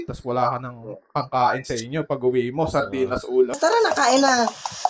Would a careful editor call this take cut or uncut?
uncut